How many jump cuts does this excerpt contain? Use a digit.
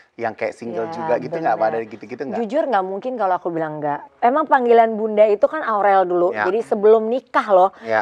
1